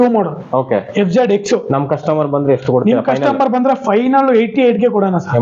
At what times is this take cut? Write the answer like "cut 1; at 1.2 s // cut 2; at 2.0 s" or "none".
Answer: none

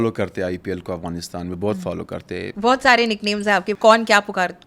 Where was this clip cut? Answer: cut 1; at 2.5 s // cut 2; at 3.7 s

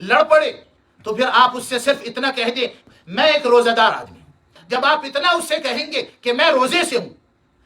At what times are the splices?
cut 1; at 4.6 s

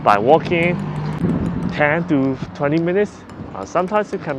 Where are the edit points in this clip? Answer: cut 1; at 1.2 s

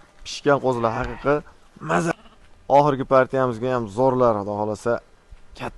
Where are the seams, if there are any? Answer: cut 1; at 2.1 s

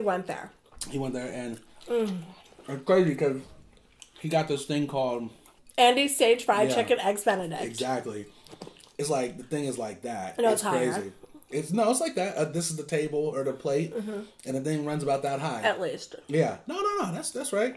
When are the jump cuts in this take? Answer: cut 1; at 5.6 s

